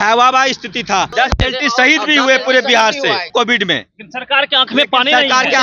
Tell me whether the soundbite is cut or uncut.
cut